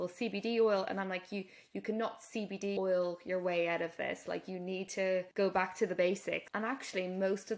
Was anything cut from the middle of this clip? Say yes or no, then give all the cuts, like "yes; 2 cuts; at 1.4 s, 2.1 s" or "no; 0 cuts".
yes; 3 cuts; at 2.8 s, 5.3 s, 6.5 s